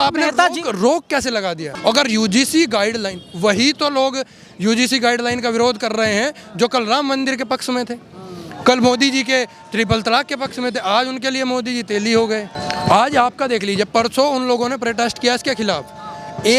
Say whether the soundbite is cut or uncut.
cut